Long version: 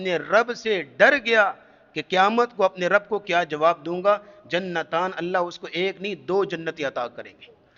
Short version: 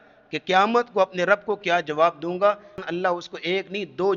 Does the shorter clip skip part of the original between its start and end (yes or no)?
yes